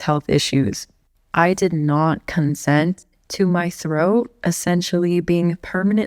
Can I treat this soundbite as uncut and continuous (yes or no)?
yes